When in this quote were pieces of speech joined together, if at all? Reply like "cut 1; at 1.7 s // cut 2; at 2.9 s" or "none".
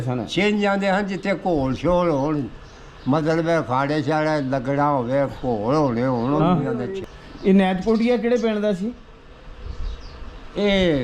none